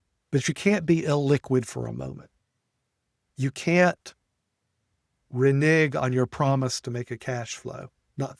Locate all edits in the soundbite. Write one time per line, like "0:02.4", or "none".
none

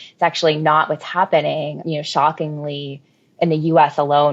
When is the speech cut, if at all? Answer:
0:01.8

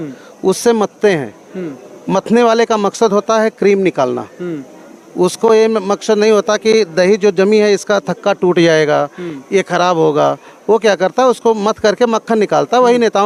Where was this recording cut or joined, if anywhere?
none

